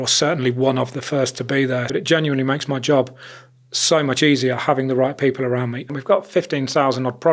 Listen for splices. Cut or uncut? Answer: cut